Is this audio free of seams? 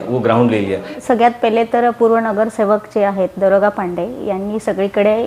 no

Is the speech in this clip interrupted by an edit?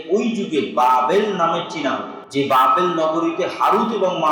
yes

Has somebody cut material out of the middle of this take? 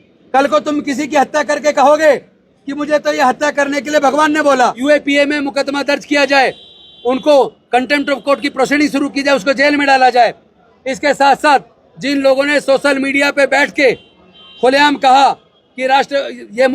yes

